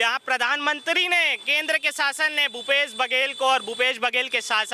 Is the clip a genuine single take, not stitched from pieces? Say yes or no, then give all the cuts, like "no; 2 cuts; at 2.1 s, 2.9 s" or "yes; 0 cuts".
yes; 0 cuts